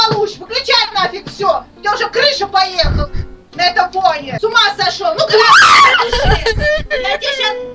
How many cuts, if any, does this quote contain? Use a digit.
1